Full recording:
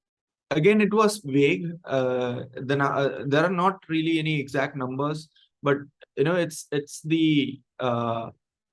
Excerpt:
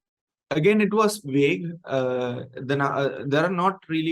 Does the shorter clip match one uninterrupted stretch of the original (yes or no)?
yes